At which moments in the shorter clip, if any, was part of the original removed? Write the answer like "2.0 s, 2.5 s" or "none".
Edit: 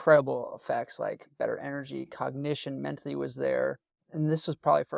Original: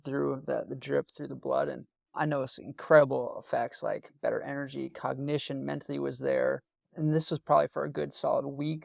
none